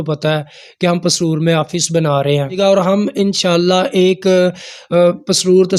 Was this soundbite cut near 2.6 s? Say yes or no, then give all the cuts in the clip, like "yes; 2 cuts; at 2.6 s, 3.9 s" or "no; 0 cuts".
yes; 1 cut; at 2.6 s